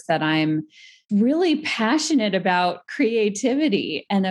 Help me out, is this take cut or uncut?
cut